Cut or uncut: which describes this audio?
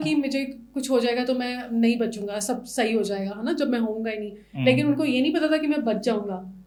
uncut